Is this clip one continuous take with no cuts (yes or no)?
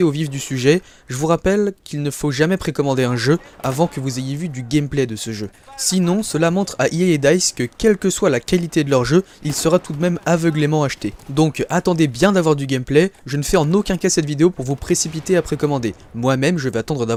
yes